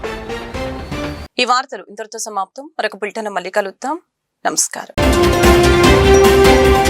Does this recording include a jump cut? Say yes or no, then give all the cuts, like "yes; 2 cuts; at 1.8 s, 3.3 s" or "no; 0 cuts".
no; 0 cuts